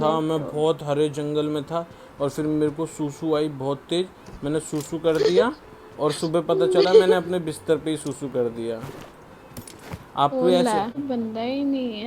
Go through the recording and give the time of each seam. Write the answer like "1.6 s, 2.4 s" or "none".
11.0 s